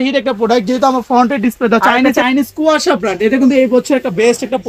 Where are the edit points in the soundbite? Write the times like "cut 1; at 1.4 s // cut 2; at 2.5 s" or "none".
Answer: cut 1; at 2.2 s